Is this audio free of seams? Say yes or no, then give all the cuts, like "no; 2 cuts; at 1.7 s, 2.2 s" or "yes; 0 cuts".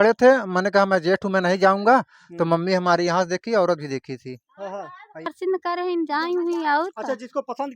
no; 1 cut; at 5.3 s